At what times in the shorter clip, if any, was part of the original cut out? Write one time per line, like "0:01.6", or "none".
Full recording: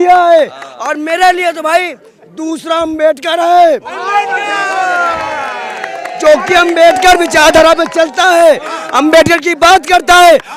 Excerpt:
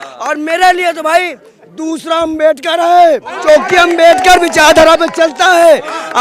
0:03.3